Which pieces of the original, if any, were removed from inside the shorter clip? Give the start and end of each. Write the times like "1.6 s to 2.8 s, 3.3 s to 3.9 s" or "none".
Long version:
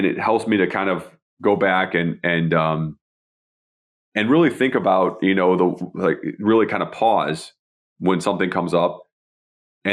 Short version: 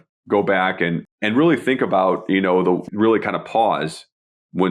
2.2 s to 4.0 s, 5.8 s to 6.3 s